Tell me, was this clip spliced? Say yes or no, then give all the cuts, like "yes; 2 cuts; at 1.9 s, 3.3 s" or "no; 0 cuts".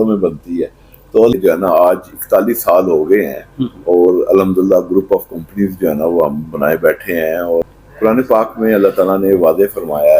yes; 2 cuts; at 1.3 s, 7.8 s